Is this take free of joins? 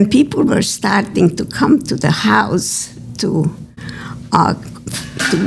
yes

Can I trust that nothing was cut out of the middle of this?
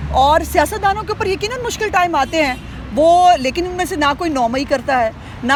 yes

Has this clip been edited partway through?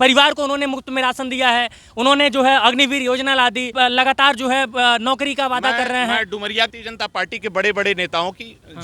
yes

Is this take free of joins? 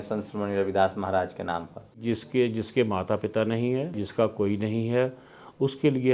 no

